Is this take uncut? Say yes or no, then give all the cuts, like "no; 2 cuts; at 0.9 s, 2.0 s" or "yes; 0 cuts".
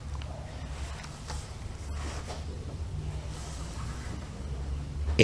yes; 0 cuts